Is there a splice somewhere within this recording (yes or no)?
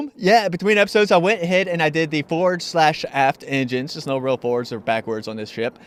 no